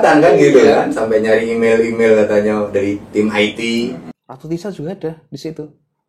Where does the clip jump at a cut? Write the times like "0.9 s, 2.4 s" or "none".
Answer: 4.1 s